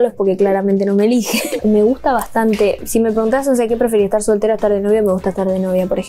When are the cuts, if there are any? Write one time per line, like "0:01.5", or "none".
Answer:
0:01.4